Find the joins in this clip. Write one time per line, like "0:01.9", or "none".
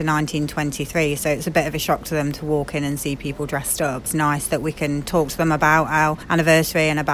0:04.1
0:06.2